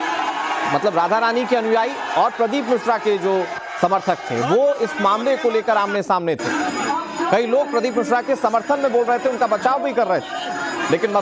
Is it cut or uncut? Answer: uncut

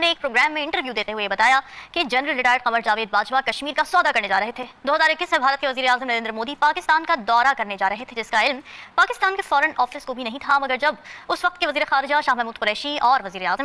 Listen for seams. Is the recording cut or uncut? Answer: uncut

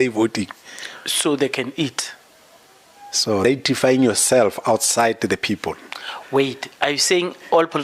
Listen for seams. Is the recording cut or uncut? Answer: cut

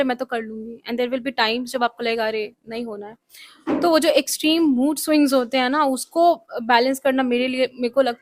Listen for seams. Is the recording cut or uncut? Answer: uncut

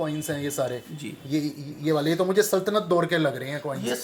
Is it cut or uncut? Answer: uncut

